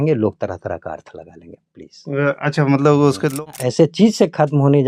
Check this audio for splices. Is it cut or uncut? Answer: cut